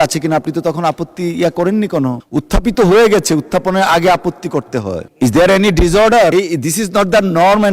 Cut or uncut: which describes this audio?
cut